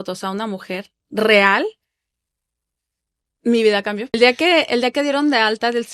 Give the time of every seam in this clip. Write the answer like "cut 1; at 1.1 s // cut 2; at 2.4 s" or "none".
cut 1; at 4.2 s